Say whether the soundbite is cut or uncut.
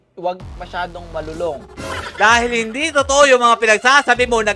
cut